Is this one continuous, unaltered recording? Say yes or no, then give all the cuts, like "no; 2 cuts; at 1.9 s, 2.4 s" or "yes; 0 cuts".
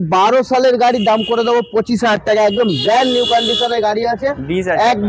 yes; 0 cuts